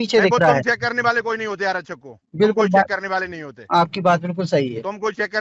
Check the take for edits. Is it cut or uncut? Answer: uncut